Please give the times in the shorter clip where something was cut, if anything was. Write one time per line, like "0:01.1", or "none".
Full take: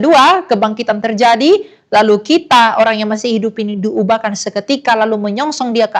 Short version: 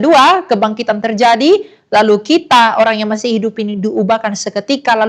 none